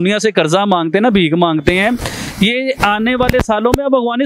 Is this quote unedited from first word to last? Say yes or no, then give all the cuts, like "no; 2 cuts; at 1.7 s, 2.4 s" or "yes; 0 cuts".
yes; 0 cuts